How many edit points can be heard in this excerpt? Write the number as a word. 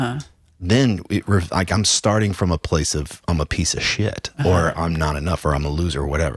zero